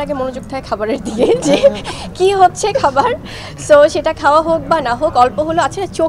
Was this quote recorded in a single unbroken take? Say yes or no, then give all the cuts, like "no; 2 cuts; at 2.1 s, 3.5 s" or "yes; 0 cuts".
yes; 0 cuts